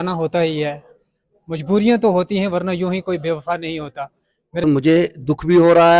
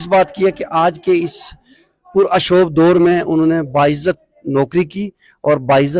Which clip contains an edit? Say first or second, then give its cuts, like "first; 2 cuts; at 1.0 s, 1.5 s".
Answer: first; 1 cut; at 4.6 s